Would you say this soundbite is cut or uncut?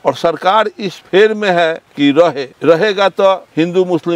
uncut